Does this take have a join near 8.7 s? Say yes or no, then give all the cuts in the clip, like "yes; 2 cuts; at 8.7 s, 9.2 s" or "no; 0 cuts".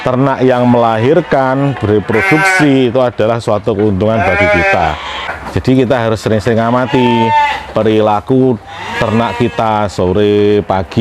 no; 1 cut; at 5.3 s